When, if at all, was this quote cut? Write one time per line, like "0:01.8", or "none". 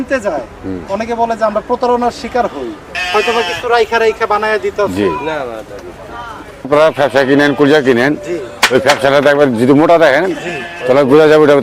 0:03.0
0:06.7